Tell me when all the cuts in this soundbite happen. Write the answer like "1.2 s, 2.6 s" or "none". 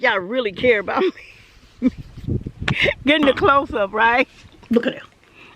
4.5 s